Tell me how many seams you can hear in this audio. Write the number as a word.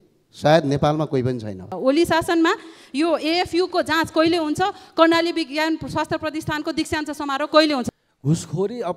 two